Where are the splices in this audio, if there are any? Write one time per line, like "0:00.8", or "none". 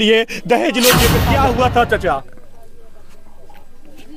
0:01.2

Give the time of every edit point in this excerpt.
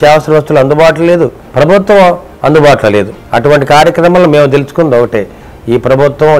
0:01.4
0:03.2

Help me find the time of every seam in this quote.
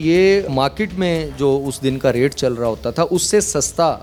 none

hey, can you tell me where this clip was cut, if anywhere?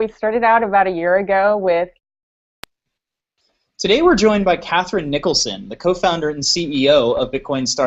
none

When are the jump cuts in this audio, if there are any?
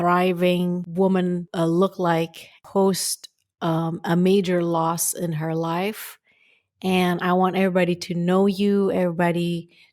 0:00.9
0:01.5
0:02.6

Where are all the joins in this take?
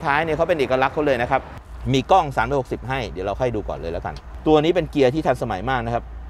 0:01.6
0:04.3

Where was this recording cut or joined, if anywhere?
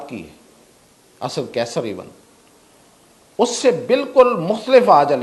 none

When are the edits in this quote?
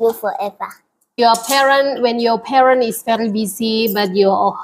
0:01.2

